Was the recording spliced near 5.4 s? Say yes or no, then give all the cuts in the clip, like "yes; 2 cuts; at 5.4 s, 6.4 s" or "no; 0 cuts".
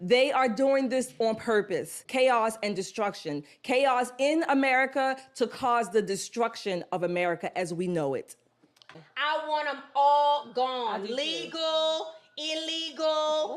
no; 2 cuts; at 2.0 s, 8.9 s